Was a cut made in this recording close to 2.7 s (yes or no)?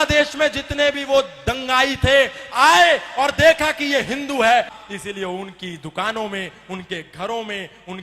no